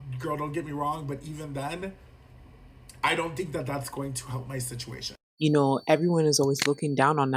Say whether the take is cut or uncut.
cut